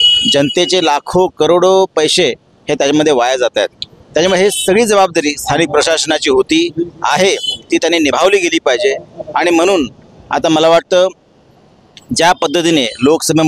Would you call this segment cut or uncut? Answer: uncut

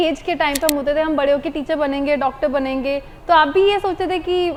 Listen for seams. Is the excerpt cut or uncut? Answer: uncut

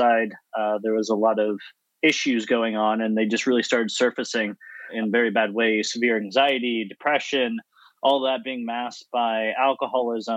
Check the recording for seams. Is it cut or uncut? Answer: cut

